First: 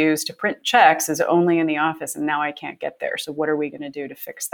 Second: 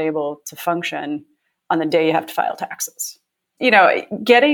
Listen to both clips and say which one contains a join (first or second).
second